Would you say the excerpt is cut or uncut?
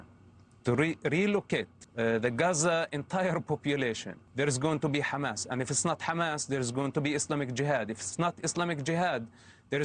cut